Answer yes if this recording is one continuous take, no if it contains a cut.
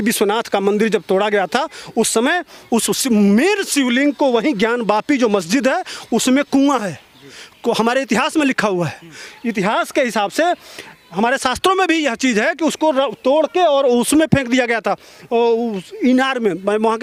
yes